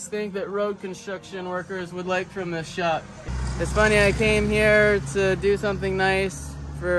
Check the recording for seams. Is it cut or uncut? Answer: cut